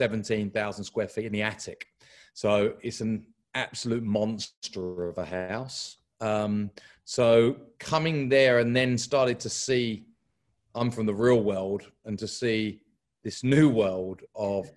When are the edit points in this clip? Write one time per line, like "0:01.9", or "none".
none